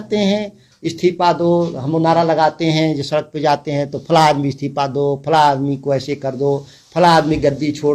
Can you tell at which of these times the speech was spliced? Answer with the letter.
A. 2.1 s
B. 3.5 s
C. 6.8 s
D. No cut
D